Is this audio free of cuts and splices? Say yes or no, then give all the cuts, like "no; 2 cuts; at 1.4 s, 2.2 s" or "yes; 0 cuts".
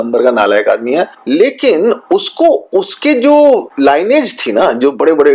no; 2 cuts; at 1.1 s, 3.7 s